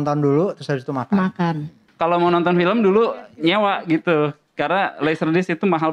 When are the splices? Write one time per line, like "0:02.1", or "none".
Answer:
0:01.8